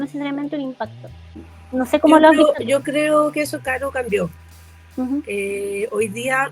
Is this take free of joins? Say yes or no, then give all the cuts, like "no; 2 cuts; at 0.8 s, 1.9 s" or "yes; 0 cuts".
no; 1 cut; at 1.3 s